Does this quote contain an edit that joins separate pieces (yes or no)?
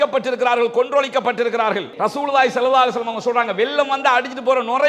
yes